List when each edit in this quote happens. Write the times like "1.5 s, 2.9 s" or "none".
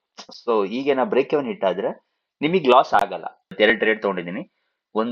3.5 s